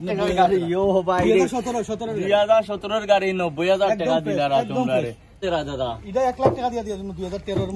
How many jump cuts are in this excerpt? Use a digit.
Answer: 1